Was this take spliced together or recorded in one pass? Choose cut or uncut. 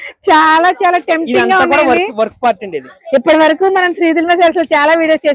uncut